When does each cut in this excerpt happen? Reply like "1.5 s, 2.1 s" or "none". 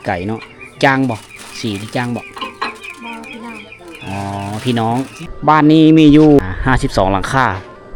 5.2 s, 6.4 s